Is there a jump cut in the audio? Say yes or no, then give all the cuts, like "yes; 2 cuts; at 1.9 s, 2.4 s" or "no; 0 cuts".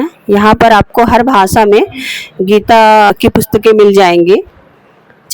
yes; 1 cut; at 3.1 s